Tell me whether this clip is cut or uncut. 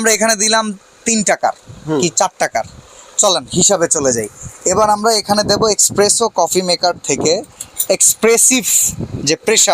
uncut